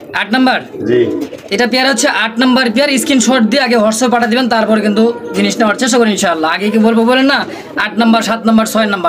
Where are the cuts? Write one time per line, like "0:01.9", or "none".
none